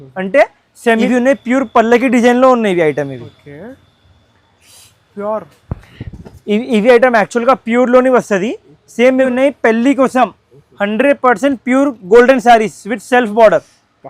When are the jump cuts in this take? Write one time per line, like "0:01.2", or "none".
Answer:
0:01.1
0:09.2